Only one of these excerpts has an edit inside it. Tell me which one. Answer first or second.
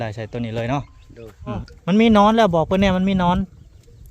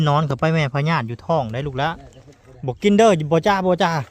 first